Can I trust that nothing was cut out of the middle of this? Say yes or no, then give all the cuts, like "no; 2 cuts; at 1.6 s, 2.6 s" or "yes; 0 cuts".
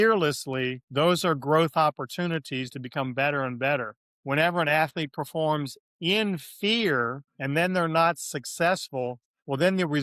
yes; 0 cuts